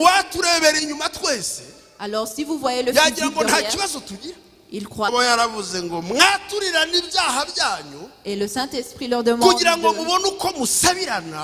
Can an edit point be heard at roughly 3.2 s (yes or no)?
no